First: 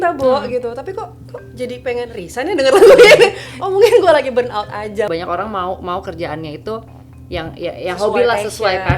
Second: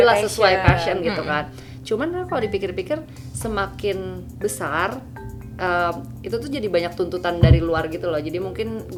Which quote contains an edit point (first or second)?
first